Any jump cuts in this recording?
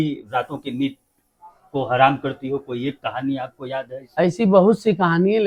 no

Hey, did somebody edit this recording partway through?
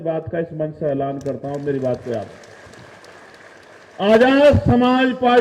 no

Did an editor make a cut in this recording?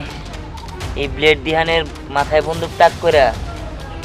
no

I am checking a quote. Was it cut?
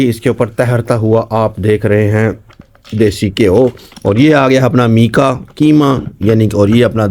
no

